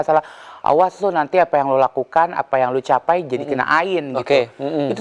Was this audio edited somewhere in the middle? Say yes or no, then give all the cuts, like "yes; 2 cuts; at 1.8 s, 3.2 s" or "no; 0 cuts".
no; 0 cuts